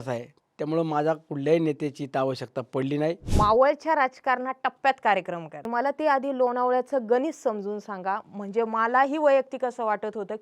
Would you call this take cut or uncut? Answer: cut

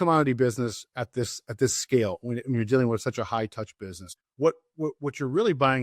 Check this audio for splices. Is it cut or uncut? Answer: cut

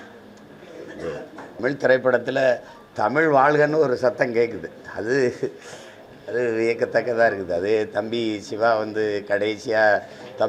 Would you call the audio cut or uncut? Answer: cut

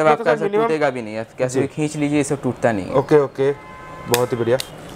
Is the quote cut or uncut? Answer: uncut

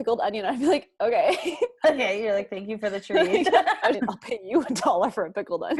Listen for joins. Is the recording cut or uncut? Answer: uncut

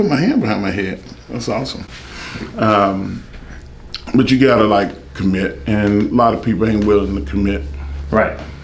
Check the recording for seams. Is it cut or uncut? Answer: uncut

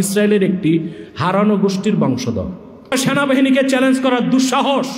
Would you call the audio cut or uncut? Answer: cut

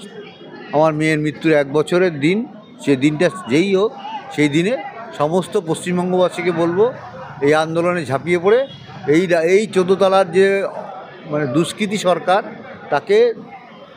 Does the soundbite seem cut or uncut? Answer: uncut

